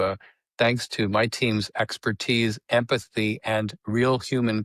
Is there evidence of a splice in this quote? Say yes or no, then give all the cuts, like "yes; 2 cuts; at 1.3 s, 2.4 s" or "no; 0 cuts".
no; 0 cuts